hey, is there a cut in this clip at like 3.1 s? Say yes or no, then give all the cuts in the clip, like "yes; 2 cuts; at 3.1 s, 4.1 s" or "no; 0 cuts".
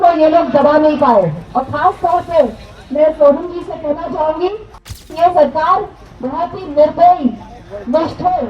no; 2 cuts; at 1.4 s, 5.1 s